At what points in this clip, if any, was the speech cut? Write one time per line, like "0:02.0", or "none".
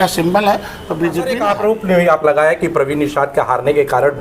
0:01.4